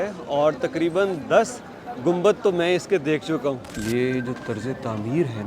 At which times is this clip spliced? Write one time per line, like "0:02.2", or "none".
0:03.7